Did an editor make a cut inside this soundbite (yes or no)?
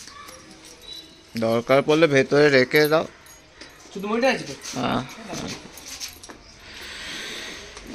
no